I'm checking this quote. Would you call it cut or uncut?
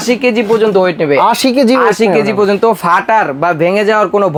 uncut